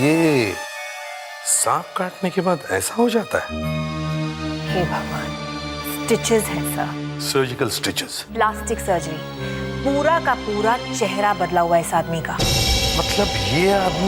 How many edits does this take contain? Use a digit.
0